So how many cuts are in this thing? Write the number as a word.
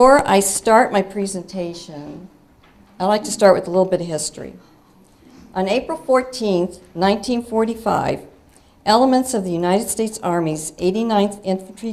zero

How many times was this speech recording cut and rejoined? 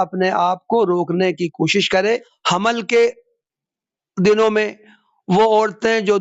one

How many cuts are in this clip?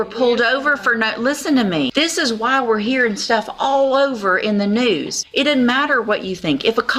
two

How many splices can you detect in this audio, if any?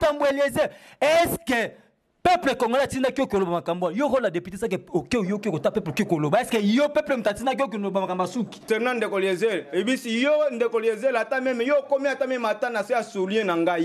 one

